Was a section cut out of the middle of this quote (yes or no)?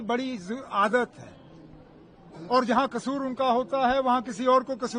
no